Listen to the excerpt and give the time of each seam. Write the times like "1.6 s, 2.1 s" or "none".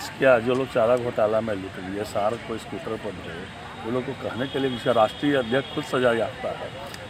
none